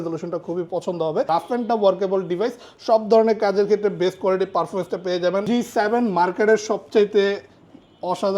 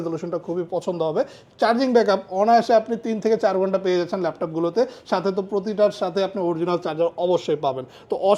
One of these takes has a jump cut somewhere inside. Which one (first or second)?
first